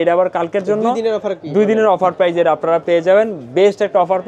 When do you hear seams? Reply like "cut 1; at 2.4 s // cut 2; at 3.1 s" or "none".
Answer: none